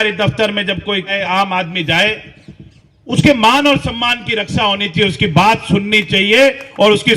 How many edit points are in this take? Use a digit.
1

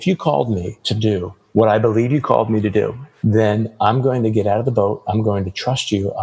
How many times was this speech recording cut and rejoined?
2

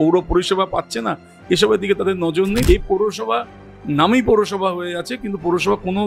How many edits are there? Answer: 1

